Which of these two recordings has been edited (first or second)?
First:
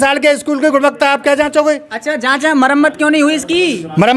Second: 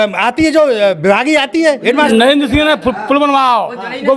second